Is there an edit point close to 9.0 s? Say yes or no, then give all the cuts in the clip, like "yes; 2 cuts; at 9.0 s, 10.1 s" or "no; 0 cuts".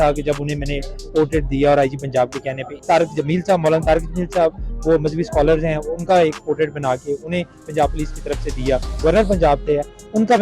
yes; 2 cuts; at 2.7 s, 9.0 s